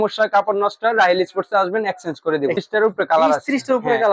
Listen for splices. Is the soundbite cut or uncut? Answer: cut